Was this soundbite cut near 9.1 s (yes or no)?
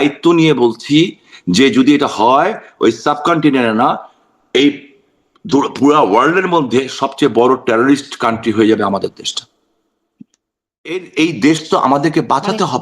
no